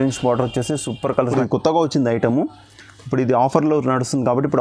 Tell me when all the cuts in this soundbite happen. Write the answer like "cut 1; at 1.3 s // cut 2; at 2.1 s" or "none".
cut 1; at 1.3 s

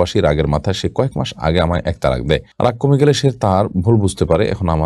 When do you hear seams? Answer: none

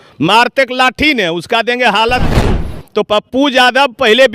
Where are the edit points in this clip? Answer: cut 1; at 2.3 s

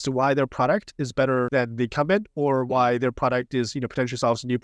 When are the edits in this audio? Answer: cut 1; at 1.5 s

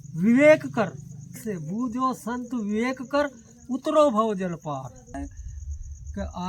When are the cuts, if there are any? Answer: cut 1; at 1.4 s // cut 2; at 5.1 s

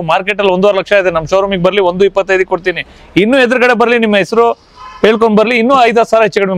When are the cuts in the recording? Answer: none

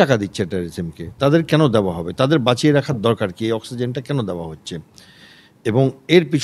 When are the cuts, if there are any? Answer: none

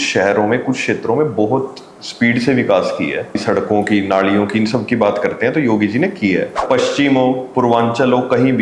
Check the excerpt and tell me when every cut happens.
cut 1; at 3.4 s // cut 2; at 6.6 s

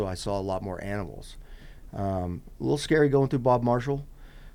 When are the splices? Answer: none

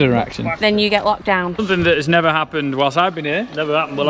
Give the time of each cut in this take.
cut 1; at 1.6 s

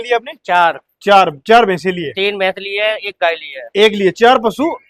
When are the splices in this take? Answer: none

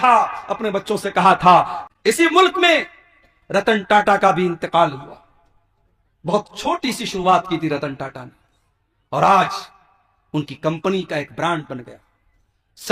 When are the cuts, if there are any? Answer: cut 1; at 1.8 s

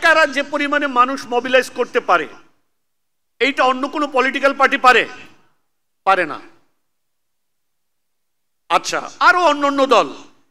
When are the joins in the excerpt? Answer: none

